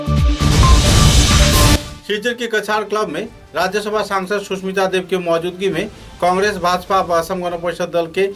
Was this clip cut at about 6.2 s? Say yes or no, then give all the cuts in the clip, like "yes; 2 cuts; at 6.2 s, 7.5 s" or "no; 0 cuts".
no; 1 cut; at 1.7 s